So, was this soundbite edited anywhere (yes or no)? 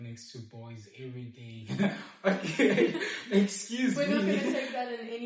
no